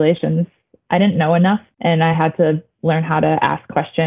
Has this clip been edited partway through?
yes; 1 cut; at 1.7 s

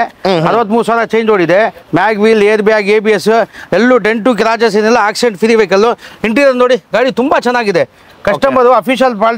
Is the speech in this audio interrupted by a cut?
no; 0 cuts

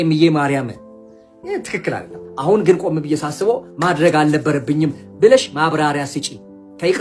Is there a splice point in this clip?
yes; 1 cut; at 2.2 s

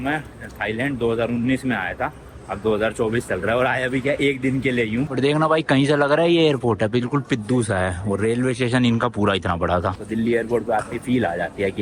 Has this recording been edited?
yes; 2 cuts; at 5.1 s, 10.0 s

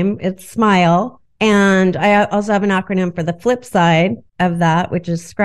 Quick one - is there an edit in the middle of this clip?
yes; 2 cuts; at 1.2 s, 4.2 s

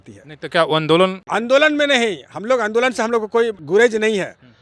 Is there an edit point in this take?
yes; 2 cuts; at 1.2 s, 3.6 s

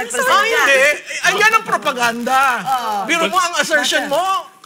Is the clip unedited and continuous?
no; 1 cut; at 1.6 s

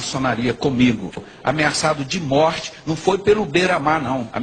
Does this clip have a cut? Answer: yes; 1 cut; at 1.2 s

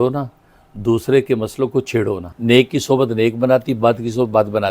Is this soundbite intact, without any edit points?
no; 1 cut; at 2.3 s

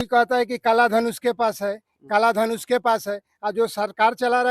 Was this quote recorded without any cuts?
yes; 0 cuts

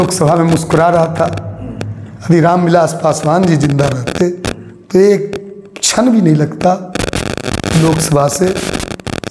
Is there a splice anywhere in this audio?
no; 0 cuts

